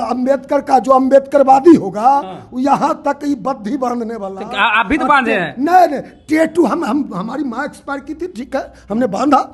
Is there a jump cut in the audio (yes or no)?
no